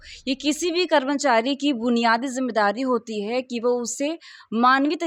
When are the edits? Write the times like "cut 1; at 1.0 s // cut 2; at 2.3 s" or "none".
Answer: none